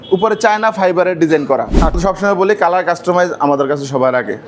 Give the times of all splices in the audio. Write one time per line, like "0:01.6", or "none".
0:02.0